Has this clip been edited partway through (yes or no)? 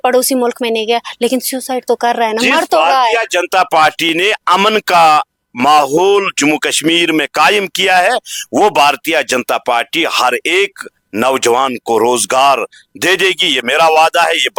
no